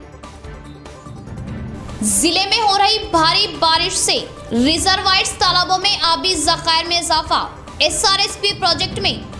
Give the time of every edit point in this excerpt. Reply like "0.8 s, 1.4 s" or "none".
1.7 s

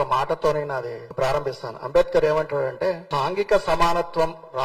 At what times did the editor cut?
1.0 s, 3.1 s

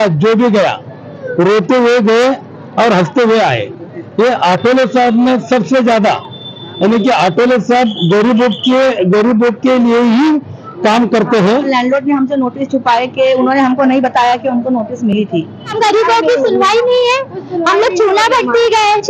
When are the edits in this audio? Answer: 11.7 s, 15.7 s

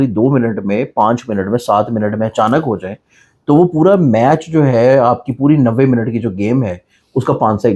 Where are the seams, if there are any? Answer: none

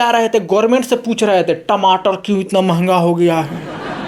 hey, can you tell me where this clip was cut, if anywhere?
none

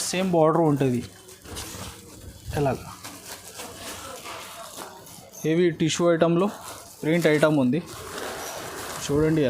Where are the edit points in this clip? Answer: 4.1 s

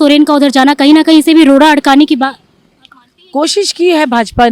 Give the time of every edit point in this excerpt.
none

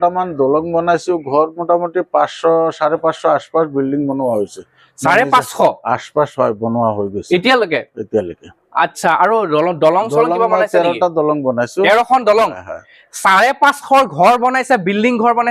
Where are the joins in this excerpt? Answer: none

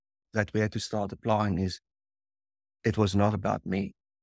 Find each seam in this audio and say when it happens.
none

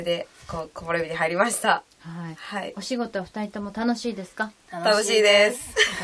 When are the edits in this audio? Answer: 4.6 s

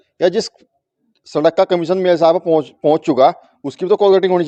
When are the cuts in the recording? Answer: none

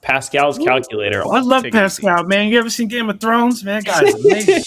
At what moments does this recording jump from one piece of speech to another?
1.2 s

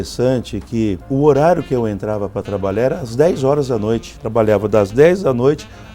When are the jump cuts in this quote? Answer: 1.0 s, 4.1 s

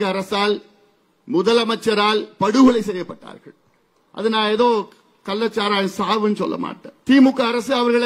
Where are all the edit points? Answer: 6.8 s

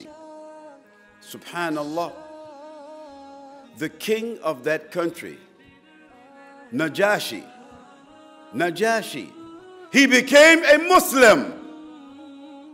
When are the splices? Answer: 11.6 s

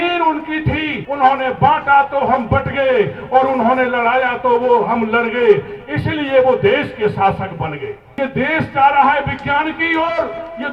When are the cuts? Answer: 1.0 s, 8.0 s

